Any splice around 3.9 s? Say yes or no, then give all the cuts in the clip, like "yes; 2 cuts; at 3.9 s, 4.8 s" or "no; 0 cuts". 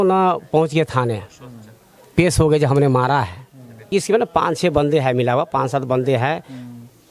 yes; 1 cut; at 3.9 s